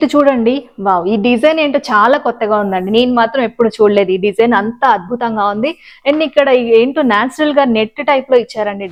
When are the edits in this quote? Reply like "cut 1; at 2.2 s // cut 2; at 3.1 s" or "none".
none